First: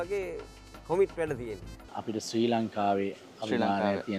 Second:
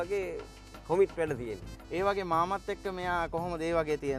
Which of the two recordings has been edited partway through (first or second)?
first